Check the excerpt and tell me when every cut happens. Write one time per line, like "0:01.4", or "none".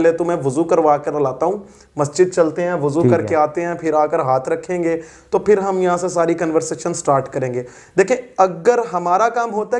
none